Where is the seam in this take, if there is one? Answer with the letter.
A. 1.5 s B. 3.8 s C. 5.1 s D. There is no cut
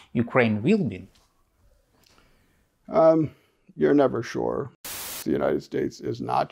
C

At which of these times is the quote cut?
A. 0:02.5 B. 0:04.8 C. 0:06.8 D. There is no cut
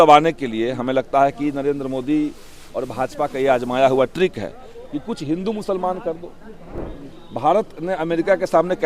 C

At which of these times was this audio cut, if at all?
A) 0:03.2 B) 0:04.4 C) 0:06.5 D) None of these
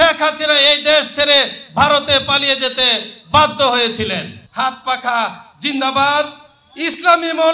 B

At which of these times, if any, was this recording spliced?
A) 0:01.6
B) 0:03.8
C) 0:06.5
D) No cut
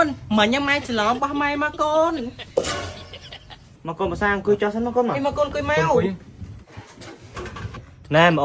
B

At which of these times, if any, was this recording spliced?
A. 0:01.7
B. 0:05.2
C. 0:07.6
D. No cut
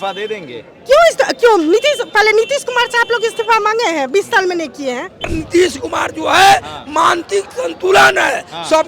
B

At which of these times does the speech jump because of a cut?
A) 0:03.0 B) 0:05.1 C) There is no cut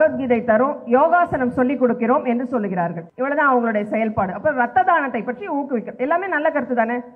A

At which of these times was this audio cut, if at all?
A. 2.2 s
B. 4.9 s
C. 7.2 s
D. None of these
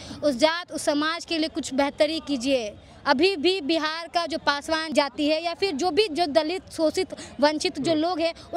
B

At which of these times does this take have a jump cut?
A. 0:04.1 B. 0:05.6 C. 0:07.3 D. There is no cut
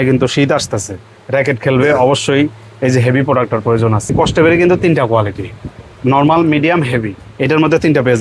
A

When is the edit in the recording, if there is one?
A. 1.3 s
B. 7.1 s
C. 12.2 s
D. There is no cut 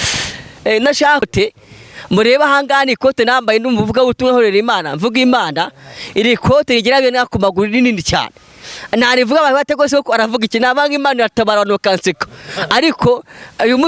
A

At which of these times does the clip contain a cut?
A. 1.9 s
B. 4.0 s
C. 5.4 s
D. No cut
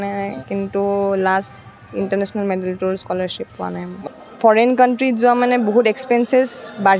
B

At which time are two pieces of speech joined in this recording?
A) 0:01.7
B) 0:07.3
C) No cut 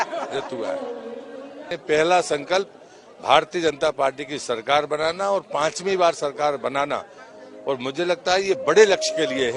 A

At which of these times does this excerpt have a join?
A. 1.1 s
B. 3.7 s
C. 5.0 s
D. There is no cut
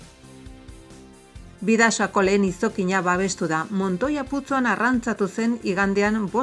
A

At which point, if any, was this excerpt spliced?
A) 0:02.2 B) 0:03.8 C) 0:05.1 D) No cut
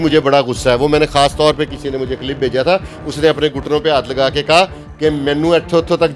D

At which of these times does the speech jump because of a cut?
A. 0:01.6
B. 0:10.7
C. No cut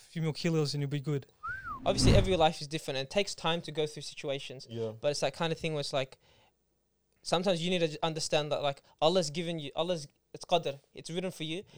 A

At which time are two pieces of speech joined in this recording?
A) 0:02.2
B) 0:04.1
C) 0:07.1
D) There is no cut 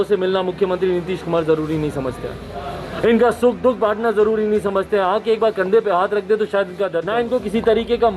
C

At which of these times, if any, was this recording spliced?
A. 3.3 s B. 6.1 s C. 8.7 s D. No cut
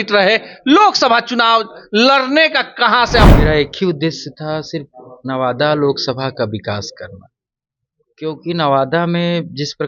A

